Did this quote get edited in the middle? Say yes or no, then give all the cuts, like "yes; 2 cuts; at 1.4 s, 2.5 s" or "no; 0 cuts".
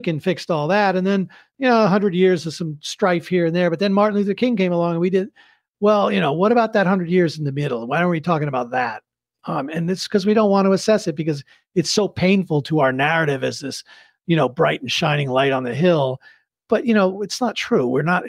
yes; 2 cuts; at 9.3 s, 16.5 s